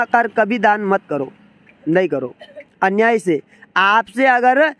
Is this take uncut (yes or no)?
yes